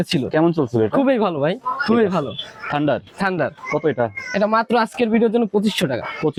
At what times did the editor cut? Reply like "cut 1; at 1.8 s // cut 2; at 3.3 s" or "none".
none